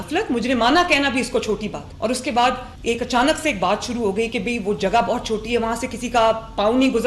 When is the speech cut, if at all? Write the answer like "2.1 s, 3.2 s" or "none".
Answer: 1.8 s, 2.7 s